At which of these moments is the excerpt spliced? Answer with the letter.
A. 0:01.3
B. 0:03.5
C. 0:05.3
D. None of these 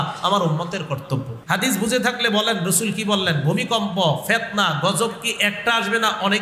A